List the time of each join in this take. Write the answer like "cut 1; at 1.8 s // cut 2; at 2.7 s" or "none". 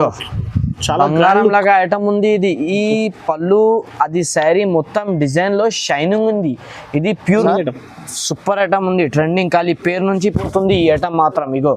cut 1; at 7.4 s